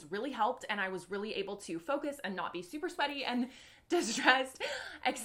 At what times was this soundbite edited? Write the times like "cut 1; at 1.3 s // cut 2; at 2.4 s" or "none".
none